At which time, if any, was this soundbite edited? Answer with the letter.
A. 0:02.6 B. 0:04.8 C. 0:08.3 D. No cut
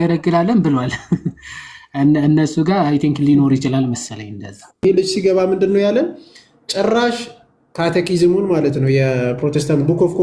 B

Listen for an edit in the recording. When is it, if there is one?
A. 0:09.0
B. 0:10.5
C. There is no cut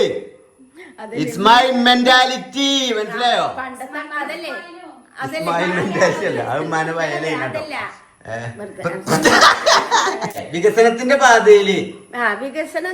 B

